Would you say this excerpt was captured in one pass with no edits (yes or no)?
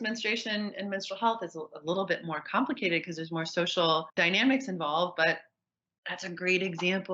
no